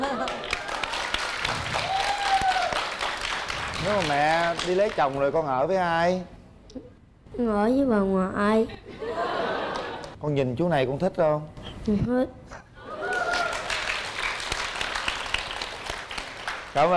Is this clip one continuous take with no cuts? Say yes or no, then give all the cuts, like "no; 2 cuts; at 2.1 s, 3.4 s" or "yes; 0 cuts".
yes; 0 cuts